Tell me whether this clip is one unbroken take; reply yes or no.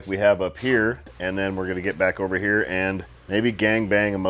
no